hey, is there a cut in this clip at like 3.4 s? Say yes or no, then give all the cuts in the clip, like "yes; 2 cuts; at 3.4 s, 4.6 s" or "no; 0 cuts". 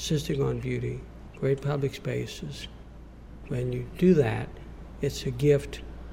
yes; 1 cut; at 3.4 s